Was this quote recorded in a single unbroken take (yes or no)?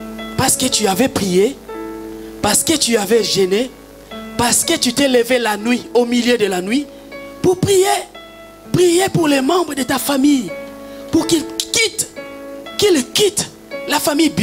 yes